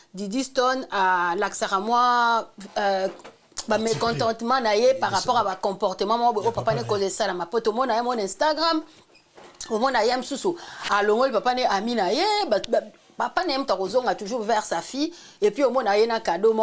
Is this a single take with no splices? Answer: yes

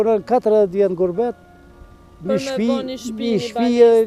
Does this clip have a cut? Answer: no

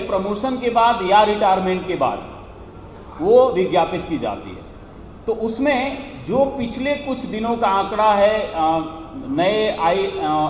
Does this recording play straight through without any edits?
yes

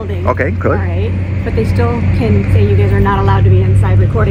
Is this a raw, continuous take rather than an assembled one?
yes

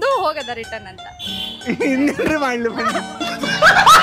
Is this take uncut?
yes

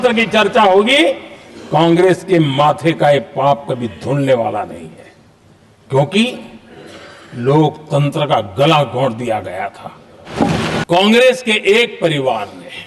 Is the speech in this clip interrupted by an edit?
yes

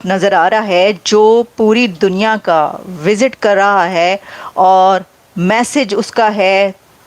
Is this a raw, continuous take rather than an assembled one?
yes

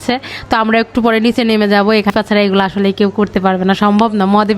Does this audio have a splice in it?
yes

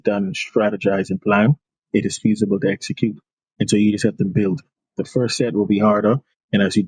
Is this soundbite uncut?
yes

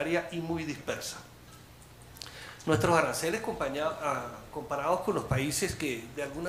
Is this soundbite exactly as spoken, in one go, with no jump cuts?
yes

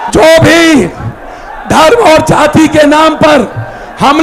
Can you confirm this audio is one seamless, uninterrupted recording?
yes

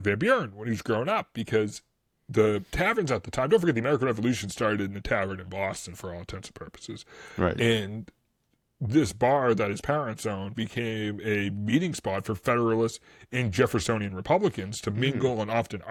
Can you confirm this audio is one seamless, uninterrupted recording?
yes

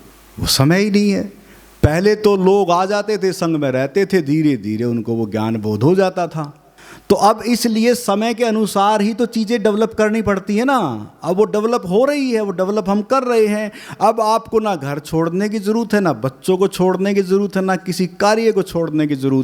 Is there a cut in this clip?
no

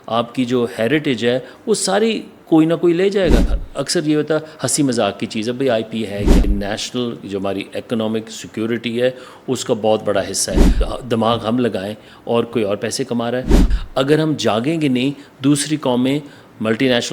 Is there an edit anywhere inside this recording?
yes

